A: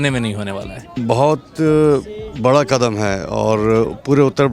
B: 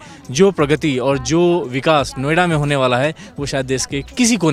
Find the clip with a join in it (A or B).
A